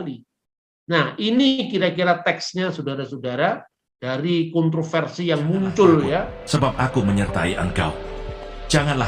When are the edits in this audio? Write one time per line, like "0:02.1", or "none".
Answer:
0:06.4